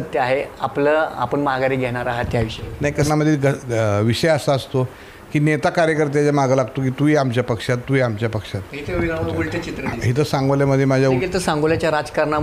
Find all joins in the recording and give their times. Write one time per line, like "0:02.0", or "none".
0:03.1
0:11.2